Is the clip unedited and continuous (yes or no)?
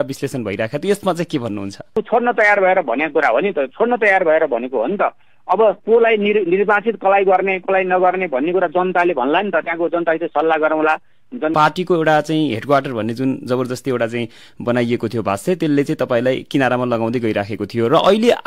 no